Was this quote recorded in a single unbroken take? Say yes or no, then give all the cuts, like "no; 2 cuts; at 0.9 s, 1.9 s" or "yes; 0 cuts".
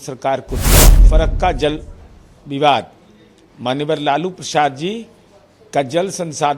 no; 1 cut; at 1.0 s